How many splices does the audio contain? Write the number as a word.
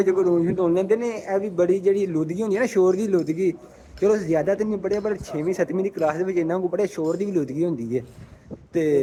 zero